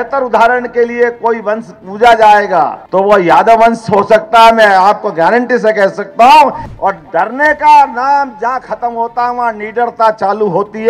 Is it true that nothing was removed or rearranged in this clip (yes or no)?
no